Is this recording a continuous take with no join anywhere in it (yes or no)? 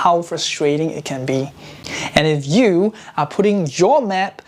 yes